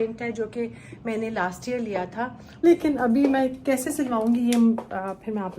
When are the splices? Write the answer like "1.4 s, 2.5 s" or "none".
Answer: 2.4 s